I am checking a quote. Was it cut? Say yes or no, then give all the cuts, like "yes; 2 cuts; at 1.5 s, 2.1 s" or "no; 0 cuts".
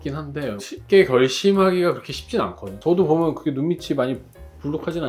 yes; 1 cut; at 2.7 s